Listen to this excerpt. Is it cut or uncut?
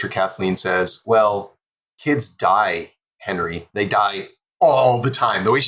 uncut